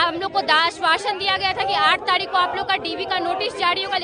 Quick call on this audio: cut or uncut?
uncut